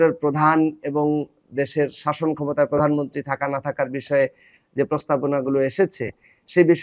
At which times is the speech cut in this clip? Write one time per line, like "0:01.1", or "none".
none